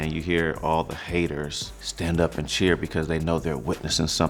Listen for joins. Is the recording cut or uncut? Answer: uncut